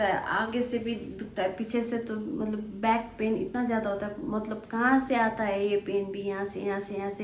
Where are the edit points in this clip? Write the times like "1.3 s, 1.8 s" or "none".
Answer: none